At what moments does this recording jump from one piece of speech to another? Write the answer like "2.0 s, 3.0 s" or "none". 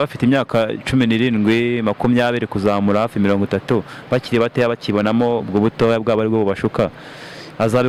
none